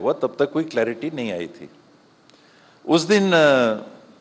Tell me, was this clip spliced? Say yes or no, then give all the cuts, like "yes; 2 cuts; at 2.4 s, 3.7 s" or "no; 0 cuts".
no; 0 cuts